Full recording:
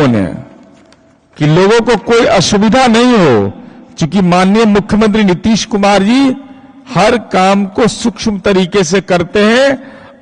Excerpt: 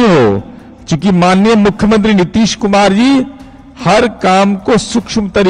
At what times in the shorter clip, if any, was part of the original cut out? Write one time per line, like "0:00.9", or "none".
none